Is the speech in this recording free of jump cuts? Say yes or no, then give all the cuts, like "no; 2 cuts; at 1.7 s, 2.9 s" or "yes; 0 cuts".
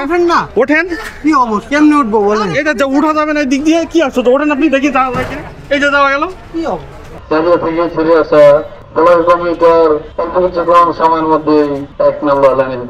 no; 4 cuts; at 7.3 s, 8.8 s, 10.1 s, 11.8 s